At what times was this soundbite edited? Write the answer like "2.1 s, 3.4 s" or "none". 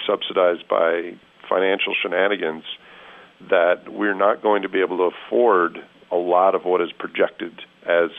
1.3 s